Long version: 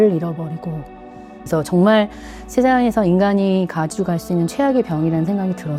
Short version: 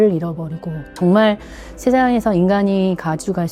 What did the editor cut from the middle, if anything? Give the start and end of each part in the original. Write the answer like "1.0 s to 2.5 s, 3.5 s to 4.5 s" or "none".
1.0 s to 1.7 s